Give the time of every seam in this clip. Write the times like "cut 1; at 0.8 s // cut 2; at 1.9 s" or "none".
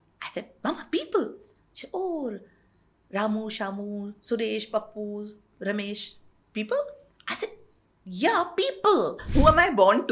cut 1; at 9.2 s